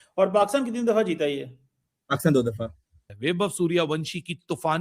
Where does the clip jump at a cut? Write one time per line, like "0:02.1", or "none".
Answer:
0:03.1